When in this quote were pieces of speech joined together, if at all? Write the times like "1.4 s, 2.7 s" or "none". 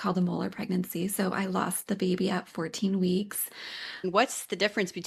4.0 s